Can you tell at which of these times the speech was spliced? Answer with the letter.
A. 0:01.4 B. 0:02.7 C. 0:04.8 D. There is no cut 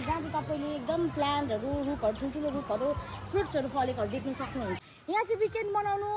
C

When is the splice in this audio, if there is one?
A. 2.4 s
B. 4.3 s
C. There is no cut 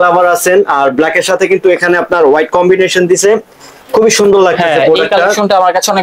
C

